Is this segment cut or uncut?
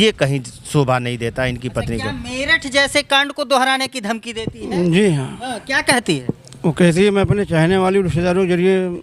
uncut